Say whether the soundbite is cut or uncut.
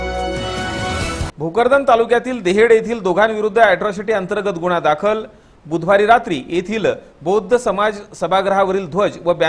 cut